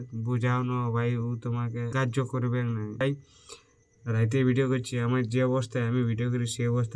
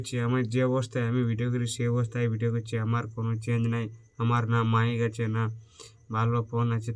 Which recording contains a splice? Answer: first; 2 cuts; at 1.9 s, 3.0 s

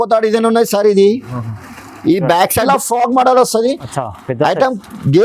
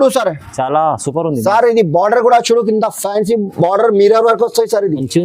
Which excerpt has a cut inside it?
first; 1 cut; at 2.7 s

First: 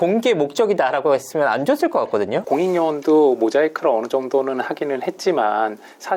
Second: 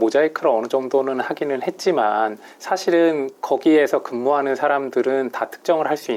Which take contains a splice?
first; 1 cut; at 2.4 s

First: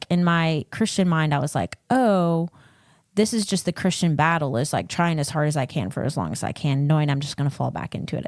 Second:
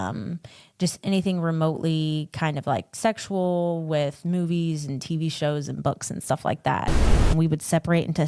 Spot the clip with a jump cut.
second; 1 cut; at 7.1 s

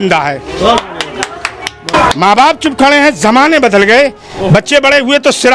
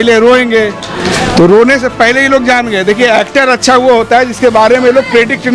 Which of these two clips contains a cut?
first; 1 cut; at 1.8 s

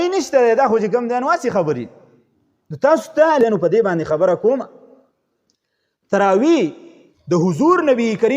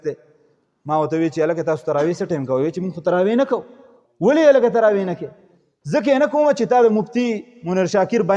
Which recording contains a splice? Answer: first; 1 cut; at 3.4 s

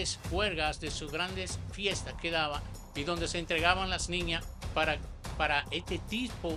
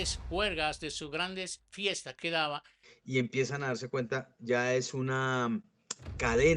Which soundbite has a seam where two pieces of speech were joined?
second; 1 cut; at 2.8 s

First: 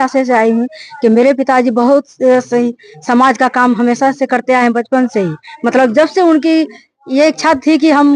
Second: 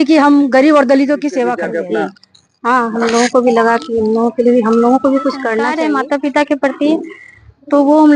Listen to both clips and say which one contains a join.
second; 2 cuts; at 1.7 s, 5.7 s

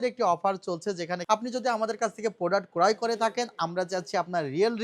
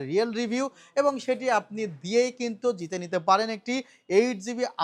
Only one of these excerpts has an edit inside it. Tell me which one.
first; 1 cut; at 1.2 s

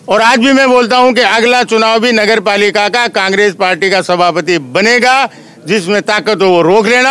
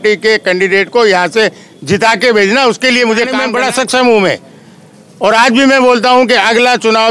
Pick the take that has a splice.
second; 1 cut; at 3.4 s

